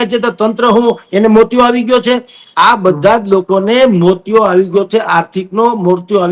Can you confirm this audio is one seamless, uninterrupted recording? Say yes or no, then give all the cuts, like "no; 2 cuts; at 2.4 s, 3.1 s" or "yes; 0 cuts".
yes; 0 cuts